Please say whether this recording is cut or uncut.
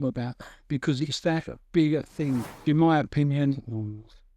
cut